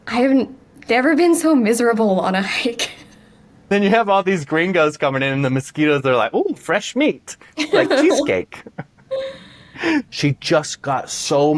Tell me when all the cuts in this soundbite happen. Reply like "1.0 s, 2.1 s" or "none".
3.7 s, 10.1 s

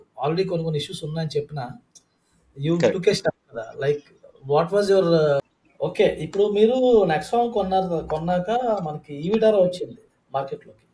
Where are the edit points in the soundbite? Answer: 5.6 s

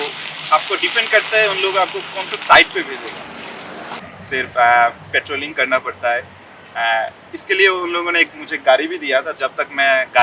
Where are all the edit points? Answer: 4.0 s

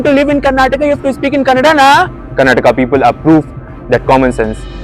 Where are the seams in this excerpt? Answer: 2.2 s

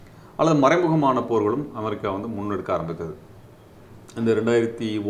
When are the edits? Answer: none

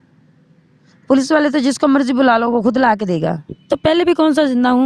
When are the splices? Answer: 3.5 s

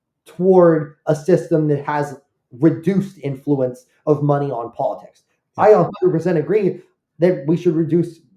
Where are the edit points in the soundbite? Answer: none

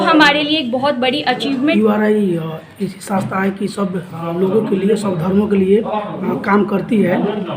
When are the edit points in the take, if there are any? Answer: 1.7 s

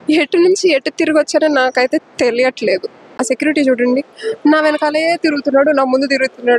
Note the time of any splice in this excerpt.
3.2 s

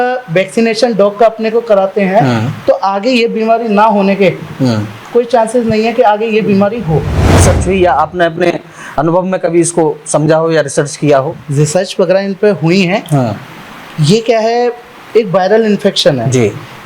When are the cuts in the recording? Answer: 7.4 s

